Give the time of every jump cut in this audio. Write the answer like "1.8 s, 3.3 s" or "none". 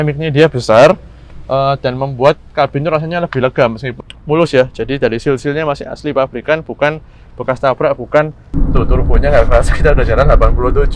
3.9 s, 8.5 s